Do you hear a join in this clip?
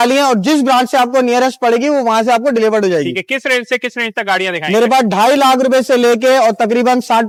no; 0 cuts

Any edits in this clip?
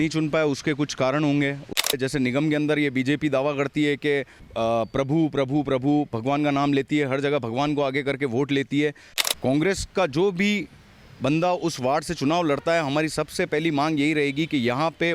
yes; 3 cuts; at 1.9 s, 4.4 s, 9.1 s

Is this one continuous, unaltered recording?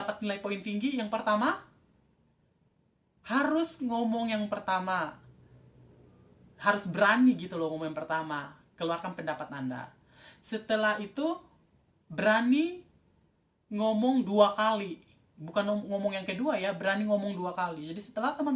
yes; 0 cuts

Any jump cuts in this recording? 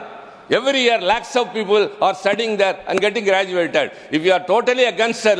no; 0 cuts

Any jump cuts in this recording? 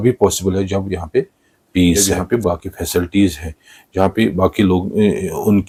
no; 0 cuts

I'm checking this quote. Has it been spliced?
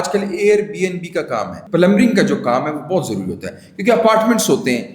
yes; 1 cut; at 1.6 s

